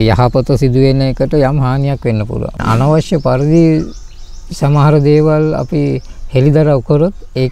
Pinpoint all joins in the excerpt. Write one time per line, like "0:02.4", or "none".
0:02.6